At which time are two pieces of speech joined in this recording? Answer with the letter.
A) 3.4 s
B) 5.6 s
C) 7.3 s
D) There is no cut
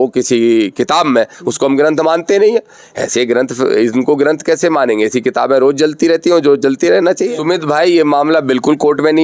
C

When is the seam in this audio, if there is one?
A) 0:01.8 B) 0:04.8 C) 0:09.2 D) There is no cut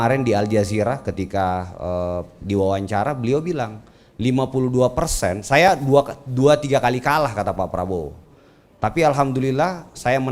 D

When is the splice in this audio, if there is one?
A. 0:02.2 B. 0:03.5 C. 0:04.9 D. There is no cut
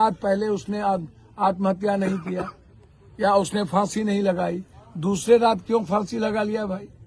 D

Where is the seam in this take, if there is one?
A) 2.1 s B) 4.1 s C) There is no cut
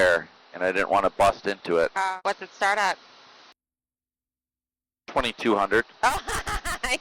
A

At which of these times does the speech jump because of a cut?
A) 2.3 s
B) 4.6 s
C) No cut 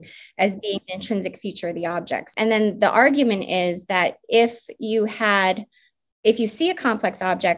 A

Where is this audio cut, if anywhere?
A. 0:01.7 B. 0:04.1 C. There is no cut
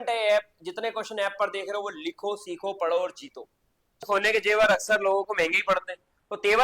B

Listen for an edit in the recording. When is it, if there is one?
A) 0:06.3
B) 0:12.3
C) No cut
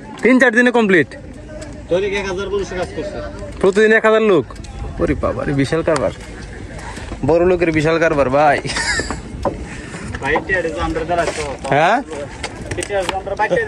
C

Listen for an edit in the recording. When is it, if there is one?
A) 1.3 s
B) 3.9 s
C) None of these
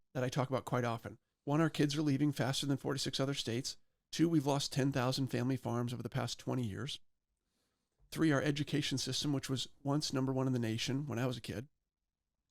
A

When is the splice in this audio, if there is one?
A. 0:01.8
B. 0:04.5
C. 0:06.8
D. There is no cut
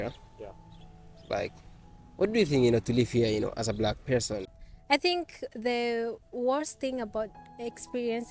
B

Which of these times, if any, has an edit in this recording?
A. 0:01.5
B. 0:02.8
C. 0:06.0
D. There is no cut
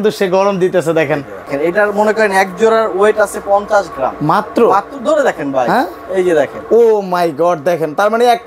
A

